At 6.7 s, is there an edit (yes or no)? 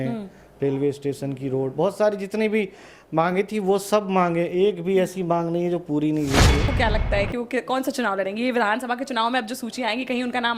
yes